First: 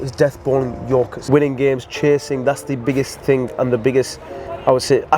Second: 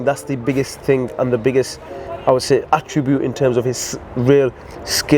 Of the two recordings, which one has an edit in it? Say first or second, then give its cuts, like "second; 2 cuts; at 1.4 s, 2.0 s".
first; 1 cut; at 1.2 s